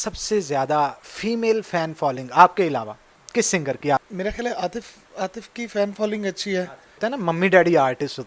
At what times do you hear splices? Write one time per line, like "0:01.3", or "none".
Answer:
0:04.0
0:06.8